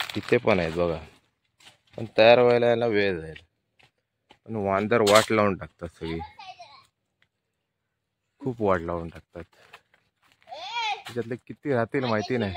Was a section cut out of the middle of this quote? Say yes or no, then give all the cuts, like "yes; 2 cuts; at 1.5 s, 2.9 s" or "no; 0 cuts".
no; 0 cuts